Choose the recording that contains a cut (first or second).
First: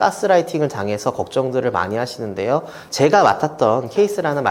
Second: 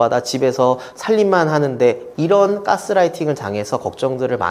first